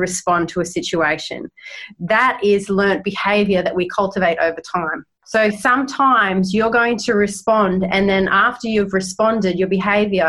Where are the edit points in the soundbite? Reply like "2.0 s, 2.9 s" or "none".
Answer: 5.2 s